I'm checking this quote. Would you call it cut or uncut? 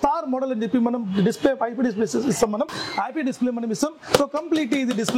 uncut